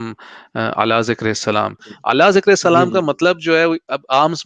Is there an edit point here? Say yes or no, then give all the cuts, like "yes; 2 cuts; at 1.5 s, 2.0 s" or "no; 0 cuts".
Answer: yes; 1 cut; at 1.9 s